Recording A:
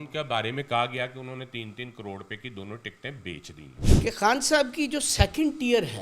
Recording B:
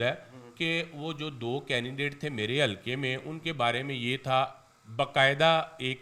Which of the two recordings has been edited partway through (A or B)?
A